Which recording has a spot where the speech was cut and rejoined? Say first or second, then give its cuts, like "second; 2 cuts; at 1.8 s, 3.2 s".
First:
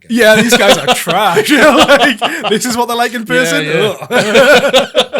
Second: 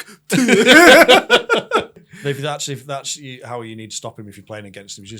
second; 1 cut; at 2.1 s